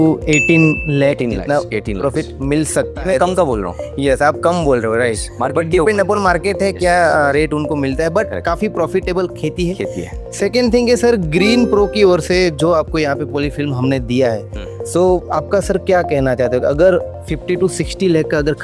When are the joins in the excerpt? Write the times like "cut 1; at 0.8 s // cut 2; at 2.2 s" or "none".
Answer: none